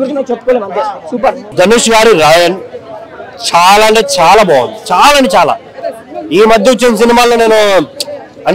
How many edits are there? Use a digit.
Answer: 0